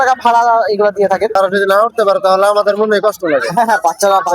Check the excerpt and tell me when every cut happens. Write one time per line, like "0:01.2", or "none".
0:01.3